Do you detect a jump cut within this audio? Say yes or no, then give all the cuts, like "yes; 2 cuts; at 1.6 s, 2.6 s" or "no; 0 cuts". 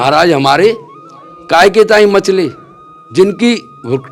no; 0 cuts